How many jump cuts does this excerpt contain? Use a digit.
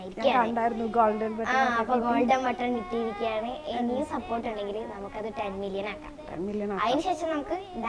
0